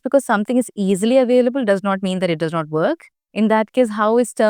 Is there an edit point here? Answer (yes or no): no